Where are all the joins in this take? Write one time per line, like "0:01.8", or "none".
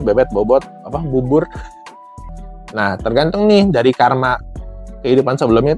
0:02.2